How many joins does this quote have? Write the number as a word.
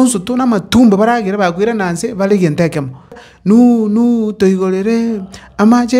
one